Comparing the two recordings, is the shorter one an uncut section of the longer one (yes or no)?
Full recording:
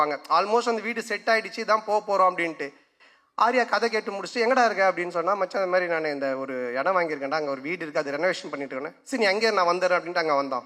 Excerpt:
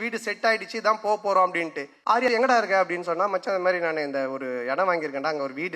no